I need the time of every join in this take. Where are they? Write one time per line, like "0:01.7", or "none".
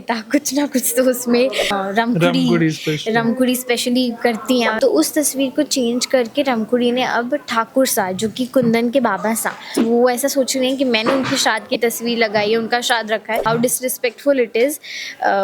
0:01.7
0:04.7
0:09.8
0:13.4